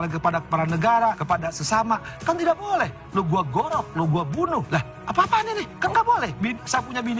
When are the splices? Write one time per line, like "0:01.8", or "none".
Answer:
0:01.2
0:04.7
0:05.7

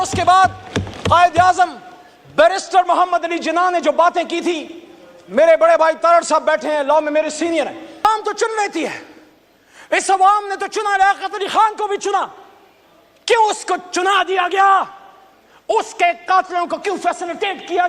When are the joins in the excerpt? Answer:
0:08.0

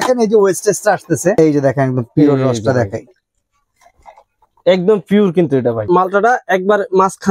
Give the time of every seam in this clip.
0:01.4
0:05.8

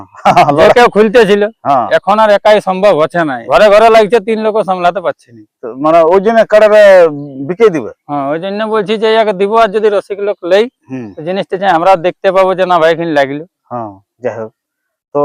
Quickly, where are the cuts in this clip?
0:03.4

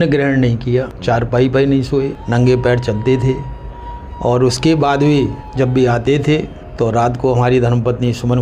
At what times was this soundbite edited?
0:00.9
0:02.2
0:05.4
0:06.6

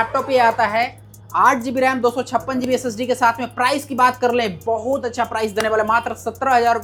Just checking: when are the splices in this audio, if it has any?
none

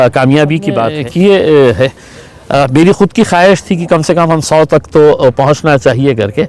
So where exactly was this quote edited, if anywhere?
0:01.0

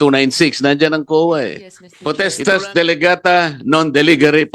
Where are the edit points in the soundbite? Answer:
0:01.9

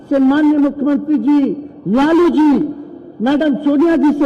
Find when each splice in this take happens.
none

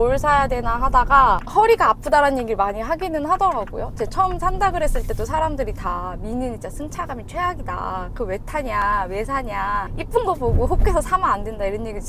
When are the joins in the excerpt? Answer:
0:01.5

